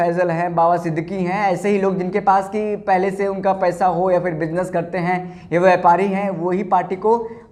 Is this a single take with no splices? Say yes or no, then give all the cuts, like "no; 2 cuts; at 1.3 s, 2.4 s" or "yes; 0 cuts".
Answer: yes; 0 cuts